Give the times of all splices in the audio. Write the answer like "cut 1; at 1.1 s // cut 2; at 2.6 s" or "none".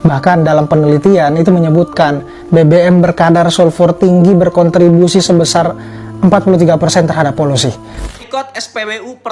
cut 1; at 8.0 s